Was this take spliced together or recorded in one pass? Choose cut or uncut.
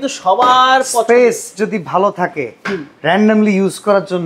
uncut